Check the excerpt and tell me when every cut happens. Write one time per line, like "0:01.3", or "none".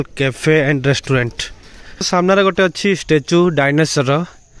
0:02.1

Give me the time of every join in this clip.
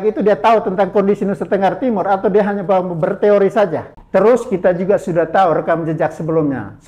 0:03.9

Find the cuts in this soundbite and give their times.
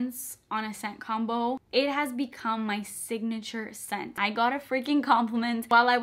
0:04.1

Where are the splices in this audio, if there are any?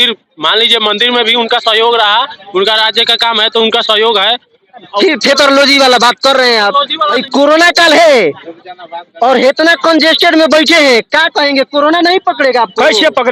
0:07.2

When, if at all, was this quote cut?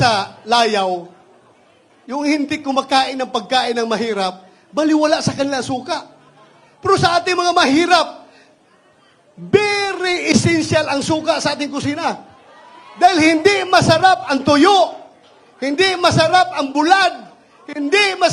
none

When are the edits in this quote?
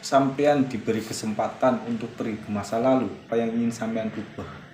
0:03.2

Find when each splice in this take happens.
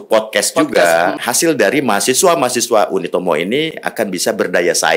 0:01.2

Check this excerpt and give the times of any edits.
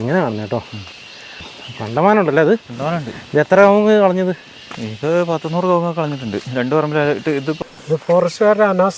0:01.5
0:07.6

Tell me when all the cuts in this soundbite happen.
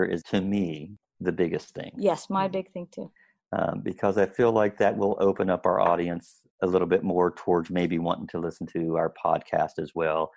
none

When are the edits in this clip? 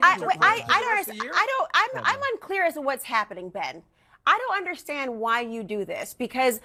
none

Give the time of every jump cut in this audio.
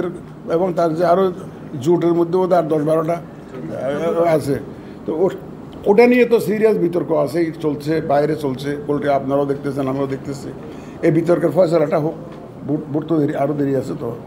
none

